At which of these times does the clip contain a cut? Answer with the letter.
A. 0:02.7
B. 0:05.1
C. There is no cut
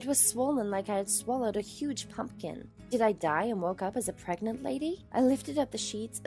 C